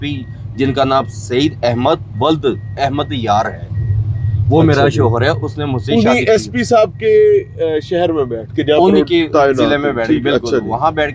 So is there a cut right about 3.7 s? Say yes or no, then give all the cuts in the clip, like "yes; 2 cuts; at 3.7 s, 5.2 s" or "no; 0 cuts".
no; 0 cuts